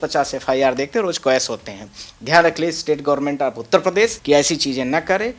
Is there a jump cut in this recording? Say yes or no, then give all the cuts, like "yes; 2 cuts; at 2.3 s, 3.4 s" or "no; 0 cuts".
yes; 1 cut; at 4.2 s